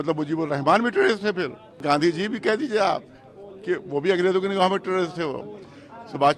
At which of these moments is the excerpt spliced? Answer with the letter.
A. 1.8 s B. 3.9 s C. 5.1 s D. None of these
A